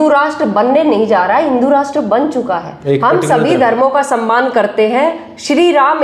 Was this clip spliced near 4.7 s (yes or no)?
no